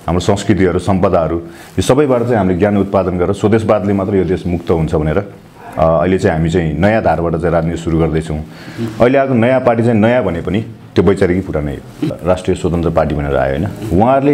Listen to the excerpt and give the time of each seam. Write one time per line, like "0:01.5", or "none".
0:12.1